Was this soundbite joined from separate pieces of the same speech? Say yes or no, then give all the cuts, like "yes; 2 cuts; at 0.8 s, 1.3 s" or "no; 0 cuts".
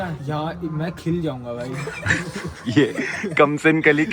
yes; 1 cut; at 2.6 s